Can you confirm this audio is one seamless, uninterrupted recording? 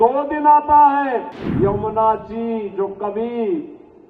no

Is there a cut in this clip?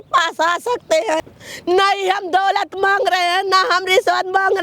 yes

